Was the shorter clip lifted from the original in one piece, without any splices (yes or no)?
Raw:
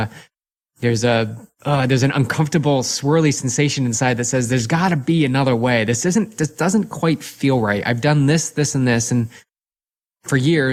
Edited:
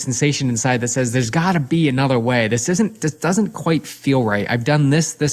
yes